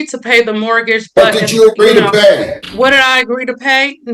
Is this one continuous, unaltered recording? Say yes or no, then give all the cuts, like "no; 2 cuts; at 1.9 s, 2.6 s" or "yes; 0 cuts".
no; 1 cut; at 2.6 s